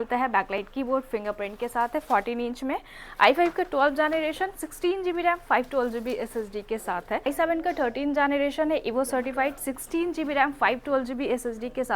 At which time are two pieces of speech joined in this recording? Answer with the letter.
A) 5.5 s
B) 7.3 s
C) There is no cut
B